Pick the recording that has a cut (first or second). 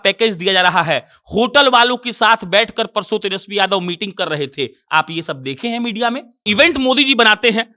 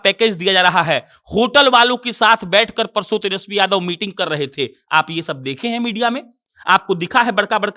first